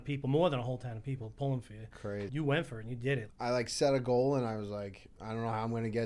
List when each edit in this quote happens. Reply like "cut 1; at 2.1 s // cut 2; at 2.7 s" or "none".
cut 1; at 2.3 s // cut 2; at 3.3 s